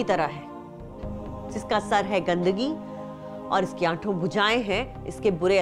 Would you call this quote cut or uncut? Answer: uncut